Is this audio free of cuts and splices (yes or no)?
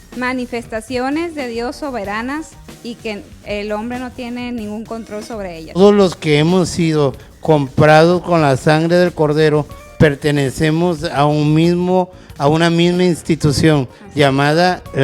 no